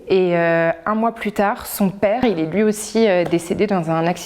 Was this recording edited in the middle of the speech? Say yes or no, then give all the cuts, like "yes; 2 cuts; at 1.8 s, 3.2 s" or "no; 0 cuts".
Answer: yes; 1 cut; at 2.2 s